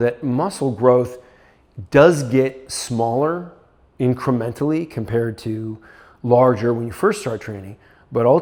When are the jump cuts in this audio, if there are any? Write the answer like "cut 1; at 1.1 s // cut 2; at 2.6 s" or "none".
none